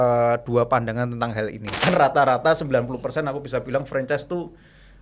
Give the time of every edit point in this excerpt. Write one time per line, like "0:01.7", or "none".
0:01.7